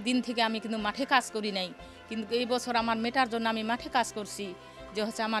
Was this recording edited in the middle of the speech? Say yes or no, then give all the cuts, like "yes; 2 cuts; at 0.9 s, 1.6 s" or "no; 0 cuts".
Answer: no; 0 cuts